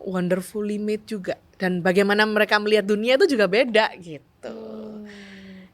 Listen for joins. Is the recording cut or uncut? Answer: cut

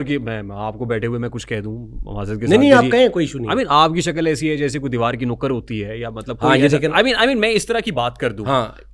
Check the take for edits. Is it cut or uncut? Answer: uncut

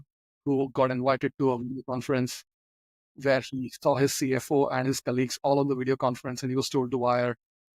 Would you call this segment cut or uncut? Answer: uncut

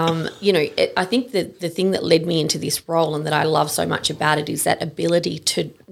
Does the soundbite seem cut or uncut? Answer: uncut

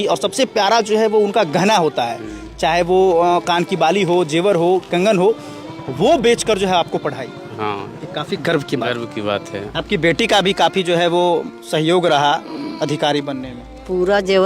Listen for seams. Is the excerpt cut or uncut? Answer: cut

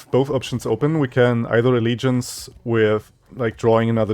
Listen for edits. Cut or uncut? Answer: cut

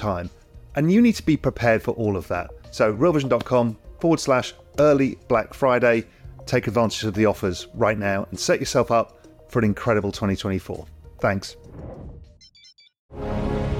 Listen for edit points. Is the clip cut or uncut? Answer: cut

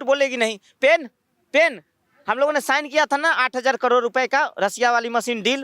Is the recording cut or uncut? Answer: uncut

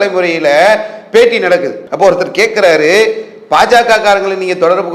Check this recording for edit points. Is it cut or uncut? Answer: cut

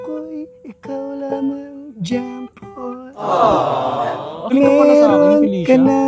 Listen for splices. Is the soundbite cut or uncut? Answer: cut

